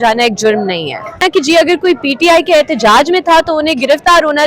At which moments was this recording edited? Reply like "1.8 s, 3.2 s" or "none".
1.2 s